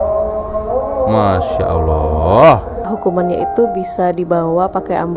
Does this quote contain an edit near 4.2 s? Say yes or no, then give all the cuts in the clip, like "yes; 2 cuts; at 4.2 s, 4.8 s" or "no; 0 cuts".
no; 1 cut; at 2.9 s